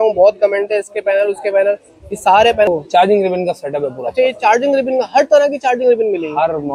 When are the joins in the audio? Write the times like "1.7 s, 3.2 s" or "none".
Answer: 2.7 s